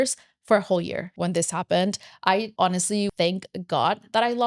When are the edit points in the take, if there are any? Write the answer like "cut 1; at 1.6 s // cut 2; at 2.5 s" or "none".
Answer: cut 1; at 1.1 s // cut 2; at 2.9 s